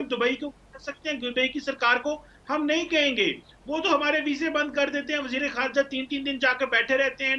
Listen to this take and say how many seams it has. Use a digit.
0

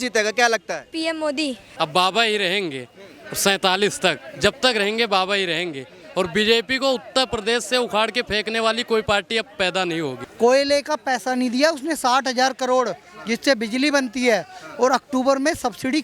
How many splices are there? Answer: 2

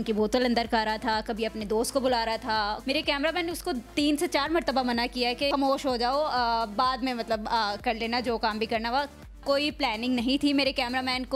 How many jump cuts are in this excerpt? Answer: 3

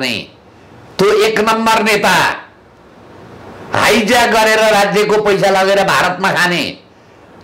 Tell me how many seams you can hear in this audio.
0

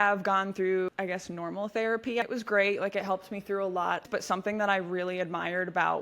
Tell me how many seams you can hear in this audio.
3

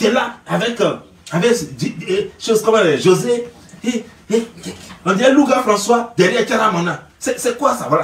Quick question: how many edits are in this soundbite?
0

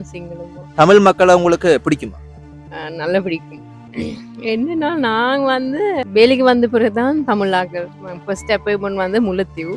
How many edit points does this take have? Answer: 2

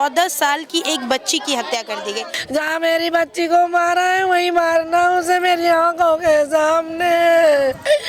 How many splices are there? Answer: 1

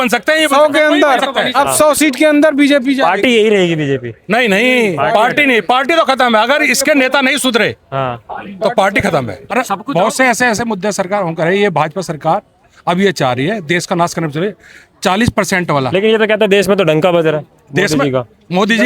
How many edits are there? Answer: 1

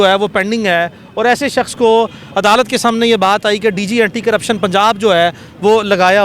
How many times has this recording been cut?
0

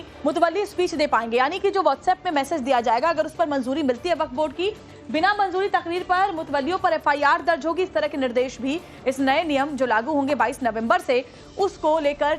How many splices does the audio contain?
1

